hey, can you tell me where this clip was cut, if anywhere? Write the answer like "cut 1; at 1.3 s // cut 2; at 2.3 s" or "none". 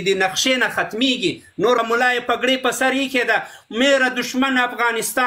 cut 1; at 1.8 s